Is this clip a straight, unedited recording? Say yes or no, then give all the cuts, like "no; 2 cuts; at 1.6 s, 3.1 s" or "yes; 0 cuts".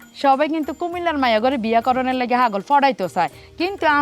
yes; 0 cuts